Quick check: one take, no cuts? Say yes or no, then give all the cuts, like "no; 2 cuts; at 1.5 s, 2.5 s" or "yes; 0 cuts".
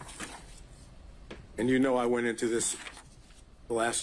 no; 1 cut; at 2.0 s